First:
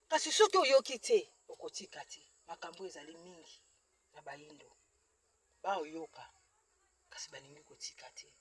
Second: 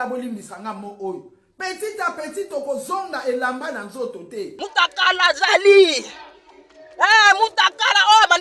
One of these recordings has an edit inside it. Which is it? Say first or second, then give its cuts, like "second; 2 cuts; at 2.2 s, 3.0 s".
second; 1 cut; at 4.6 s